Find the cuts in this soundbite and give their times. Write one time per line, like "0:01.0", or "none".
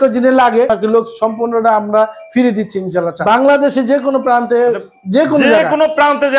0:03.2

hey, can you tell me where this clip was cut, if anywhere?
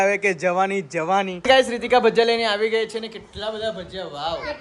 0:01.3

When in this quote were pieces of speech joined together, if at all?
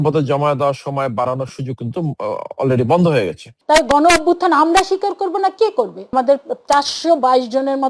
0:03.5
0:06.1

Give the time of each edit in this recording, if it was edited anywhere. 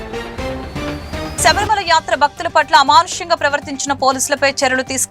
0:01.3

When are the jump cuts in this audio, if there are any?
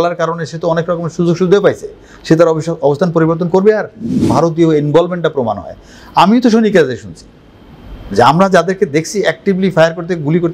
0:04.2

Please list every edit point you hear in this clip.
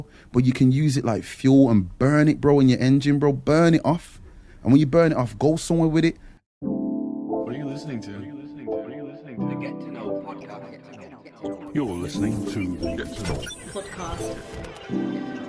0:06.3

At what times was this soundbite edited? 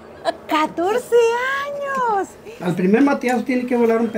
0:02.4

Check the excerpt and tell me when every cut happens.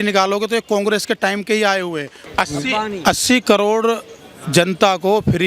0:02.1

